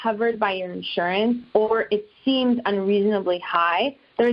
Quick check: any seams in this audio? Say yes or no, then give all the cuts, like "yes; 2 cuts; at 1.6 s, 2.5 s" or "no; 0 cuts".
no; 0 cuts